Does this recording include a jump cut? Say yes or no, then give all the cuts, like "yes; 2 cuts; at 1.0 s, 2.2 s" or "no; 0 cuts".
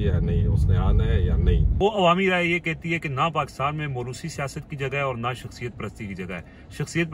yes; 1 cut; at 1.7 s